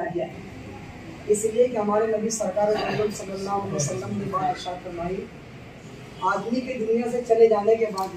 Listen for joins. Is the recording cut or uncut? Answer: uncut